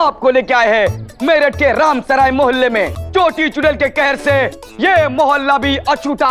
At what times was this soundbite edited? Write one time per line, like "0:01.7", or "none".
0:03.0